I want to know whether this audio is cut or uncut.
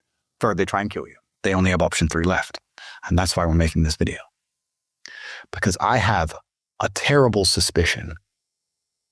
cut